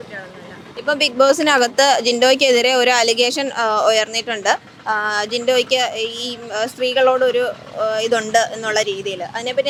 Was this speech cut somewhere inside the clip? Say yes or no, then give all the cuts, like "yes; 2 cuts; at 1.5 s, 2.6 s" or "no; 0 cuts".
no; 0 cuts